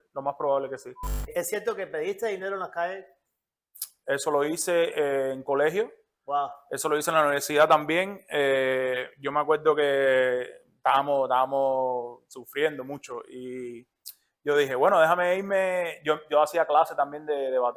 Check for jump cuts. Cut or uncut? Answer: cut